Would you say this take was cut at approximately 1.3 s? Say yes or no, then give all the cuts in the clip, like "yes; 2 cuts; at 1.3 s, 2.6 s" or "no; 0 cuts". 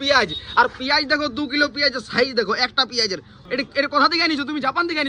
no; 1 cut; at 3.3 s